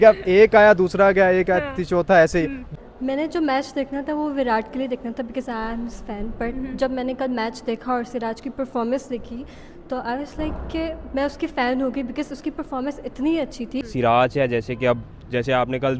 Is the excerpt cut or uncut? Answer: cut